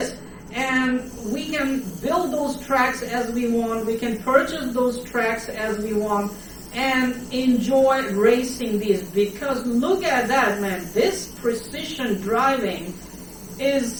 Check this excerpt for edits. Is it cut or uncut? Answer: uncut